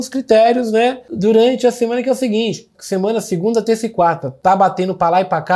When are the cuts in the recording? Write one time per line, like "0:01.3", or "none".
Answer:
0:01.1
0:02.7
0:04.3